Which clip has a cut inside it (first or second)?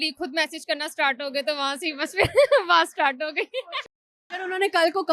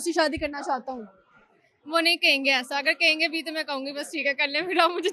first